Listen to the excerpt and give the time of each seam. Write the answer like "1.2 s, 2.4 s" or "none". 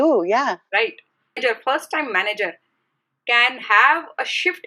1.4 s